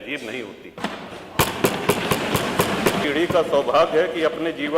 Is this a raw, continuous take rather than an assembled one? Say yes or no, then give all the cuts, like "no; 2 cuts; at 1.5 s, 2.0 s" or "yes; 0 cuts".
no; 1 cut; at 3.1 s